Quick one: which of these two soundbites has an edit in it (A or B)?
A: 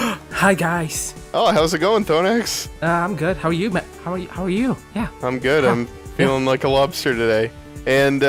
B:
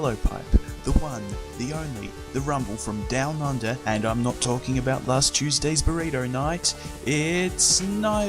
B